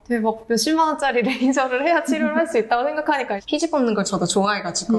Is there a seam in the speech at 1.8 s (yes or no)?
no